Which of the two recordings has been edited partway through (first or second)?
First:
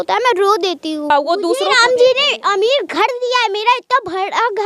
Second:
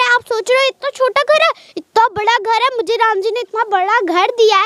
first